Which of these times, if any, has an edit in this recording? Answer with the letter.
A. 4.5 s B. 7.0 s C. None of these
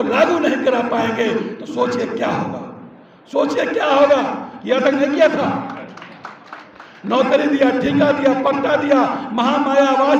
A